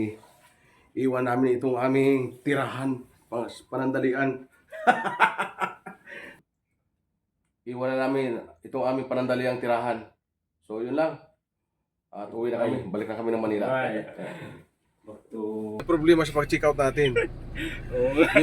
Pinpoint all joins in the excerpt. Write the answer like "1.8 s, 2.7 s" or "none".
6.5 s, 15.8 s